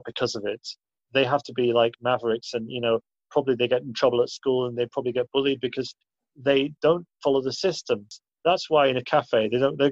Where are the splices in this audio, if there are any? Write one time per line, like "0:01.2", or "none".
0:08.1